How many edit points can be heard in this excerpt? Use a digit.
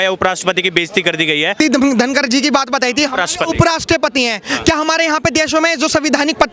1